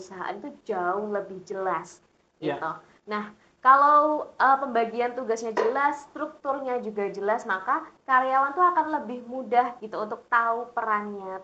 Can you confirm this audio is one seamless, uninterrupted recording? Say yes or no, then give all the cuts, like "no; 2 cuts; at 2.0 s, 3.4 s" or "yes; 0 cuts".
yes; 0 cuts